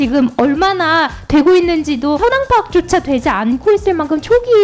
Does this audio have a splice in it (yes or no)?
yes